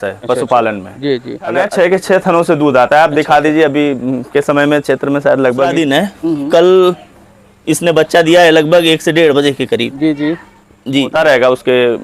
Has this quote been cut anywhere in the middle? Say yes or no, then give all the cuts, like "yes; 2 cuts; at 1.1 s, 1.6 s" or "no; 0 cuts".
yes; 3 cuts; at 1.7 s, 5.7 s, 11.1 s